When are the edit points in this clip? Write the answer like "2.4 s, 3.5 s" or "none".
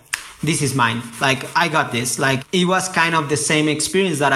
2.4 s